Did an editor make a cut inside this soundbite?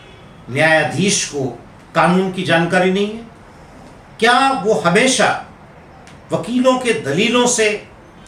no; 0 cuts

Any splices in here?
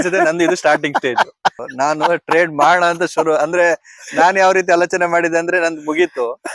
yes; 1 cut; at 1.6 s

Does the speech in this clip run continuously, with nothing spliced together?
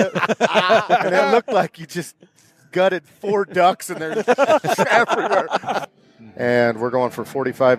no; 1 cut; at 5.8 s

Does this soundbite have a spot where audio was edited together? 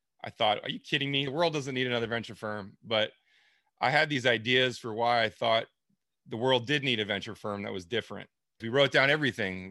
yes; 2 cuts; at 1.3 s, 8.6 s

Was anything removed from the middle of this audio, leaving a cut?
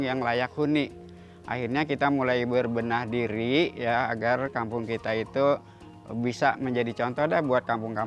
no; 0 cuts

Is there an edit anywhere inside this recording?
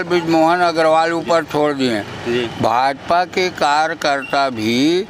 no; 0 cuts

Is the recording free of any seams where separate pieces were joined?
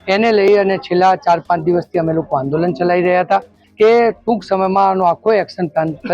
no; 1 cut; at 3.6 s

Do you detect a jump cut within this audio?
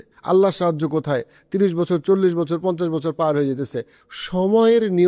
yes; 1 cut; at 3.9 s

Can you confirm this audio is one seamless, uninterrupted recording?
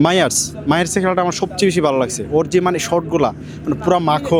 yes; 0 cuts

